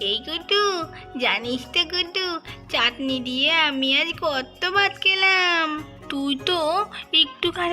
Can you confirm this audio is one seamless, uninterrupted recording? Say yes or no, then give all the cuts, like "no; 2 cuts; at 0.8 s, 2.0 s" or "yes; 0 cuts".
no; 1 cut; at 5.9 s